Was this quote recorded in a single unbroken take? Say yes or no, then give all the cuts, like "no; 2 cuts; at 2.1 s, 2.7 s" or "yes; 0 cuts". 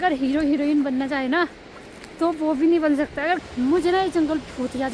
no; 1 cut; at 3.4 s